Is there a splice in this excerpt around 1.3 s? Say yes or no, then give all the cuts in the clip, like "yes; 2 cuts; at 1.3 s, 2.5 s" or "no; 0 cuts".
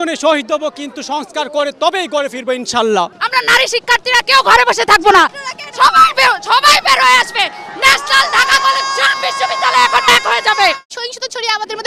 no; 2 cuts; at 3.2 s, 10.9 s